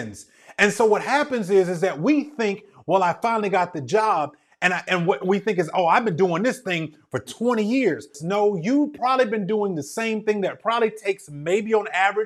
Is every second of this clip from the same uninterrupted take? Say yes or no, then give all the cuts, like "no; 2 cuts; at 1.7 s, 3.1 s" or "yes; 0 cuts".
no; 1 cut; at 8.2 s